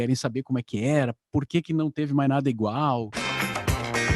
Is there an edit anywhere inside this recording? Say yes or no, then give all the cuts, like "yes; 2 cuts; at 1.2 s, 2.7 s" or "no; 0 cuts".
yes; 1 cut; at 3.2 s